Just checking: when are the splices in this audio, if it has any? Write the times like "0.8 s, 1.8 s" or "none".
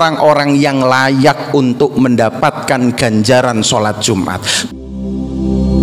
4.5 s

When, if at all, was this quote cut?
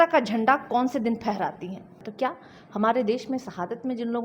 2.0 s

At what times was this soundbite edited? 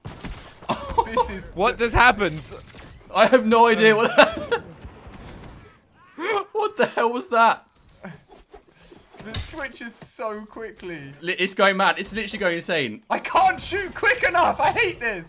11.2 s, 13.0 s

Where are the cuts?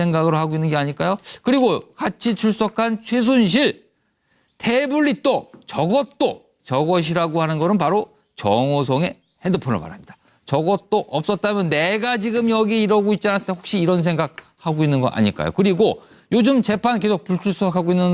16.3 s

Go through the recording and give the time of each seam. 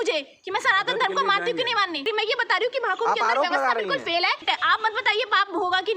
2.1 s, 4.4 s

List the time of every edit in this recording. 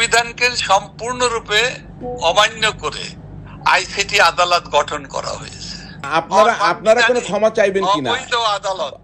5.9 s

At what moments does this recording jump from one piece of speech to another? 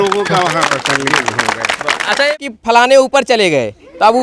2.3 s

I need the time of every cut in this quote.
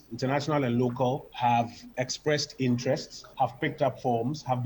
1.3 s, 1.8 s, 3.2 s

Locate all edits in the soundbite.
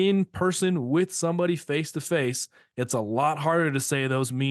none

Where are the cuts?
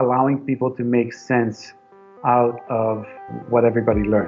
3.3 s

